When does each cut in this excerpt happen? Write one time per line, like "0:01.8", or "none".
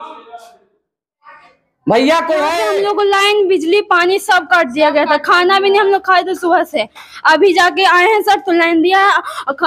0:02.6